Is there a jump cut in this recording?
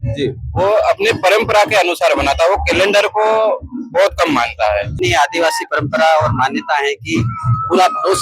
yes; 1 cut; at 4.9 s

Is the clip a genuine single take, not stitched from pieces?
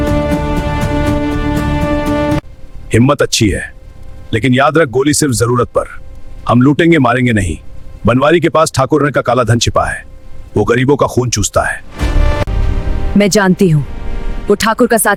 yes; 0 cuts

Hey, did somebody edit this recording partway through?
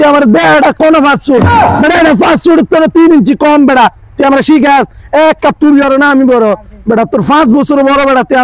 no; 0 cuts

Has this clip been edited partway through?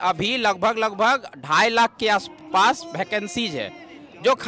no; 0 cuts

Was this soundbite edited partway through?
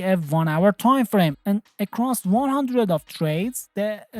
yes; 1 cut; at 1.4 s

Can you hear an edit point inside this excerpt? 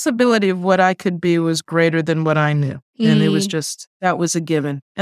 yes; 2 cuts; at 2.8 s, 3.8 s

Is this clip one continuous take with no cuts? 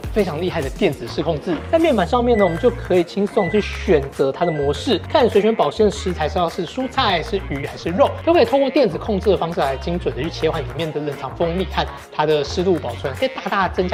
yes; 0 cuts

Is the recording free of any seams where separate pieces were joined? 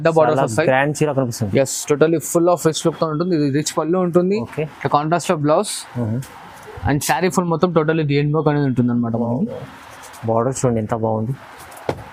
yes; 0 cuts

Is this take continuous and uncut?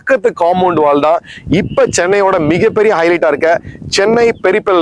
yes; 0 cuts

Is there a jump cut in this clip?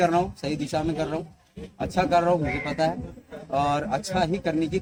no; 0 cuts

